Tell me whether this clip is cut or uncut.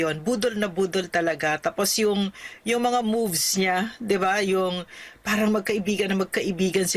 uncut